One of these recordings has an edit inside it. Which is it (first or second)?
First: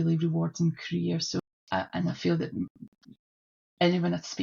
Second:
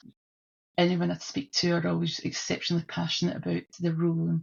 first